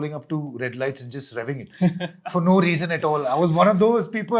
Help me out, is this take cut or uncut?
uncut